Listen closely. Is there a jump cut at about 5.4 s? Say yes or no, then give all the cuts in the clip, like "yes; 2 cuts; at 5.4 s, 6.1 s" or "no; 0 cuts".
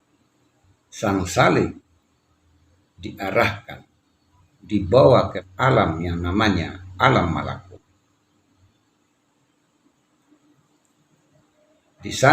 yes; 1 cut; at 5.4 s